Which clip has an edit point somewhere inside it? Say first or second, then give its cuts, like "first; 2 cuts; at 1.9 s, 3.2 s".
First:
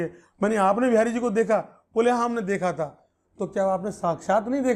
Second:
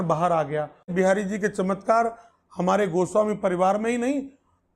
second; 1 cut; at 0.9 s